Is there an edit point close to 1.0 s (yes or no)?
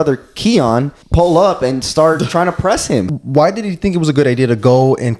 yes